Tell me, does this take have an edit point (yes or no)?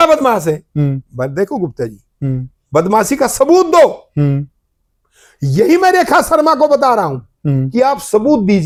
no